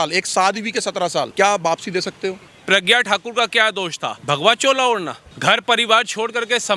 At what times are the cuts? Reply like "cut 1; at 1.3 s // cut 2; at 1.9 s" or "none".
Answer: cut 1; at 1.3 s // cut 2; at 2.5 s // cut 3; at 4.1 s // cut 4; at 5.2 s